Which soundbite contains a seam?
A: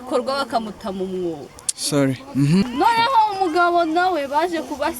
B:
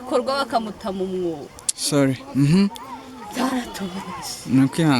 A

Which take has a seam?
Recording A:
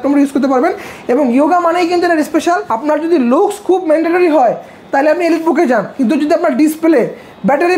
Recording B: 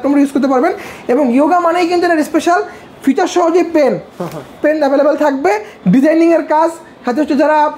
A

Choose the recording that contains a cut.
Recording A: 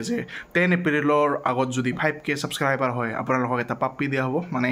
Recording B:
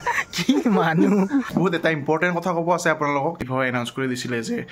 B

